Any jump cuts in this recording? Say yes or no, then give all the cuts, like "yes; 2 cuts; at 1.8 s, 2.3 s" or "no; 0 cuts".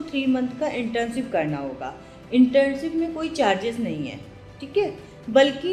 no; 0 cuts